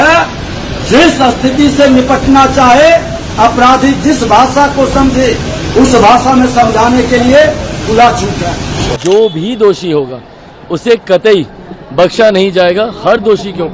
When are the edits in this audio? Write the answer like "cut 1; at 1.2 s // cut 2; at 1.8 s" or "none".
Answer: cut 1; at 8.9 s